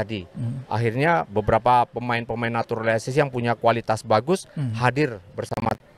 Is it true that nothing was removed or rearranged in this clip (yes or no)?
yes